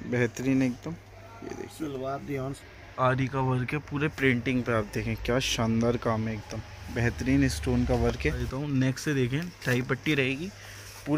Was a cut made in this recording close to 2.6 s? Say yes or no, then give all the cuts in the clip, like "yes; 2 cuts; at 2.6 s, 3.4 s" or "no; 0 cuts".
yes; 2 cuts; at 2.6 s, 8.4 s